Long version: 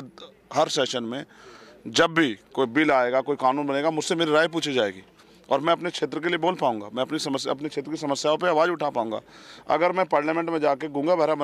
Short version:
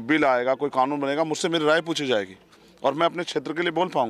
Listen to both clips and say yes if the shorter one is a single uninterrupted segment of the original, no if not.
yes